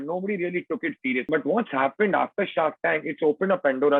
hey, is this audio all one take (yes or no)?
no